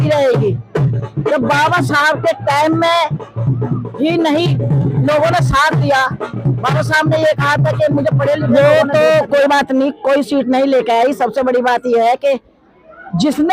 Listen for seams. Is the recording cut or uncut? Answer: cut